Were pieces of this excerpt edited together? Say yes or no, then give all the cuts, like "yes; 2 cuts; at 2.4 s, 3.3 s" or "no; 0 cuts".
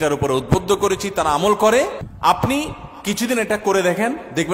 yes; 1 cut; at 2.0 s